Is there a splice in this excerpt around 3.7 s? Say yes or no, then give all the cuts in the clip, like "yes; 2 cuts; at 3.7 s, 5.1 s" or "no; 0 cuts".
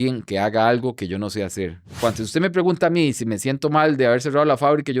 no; 1 cut; at 2.0 s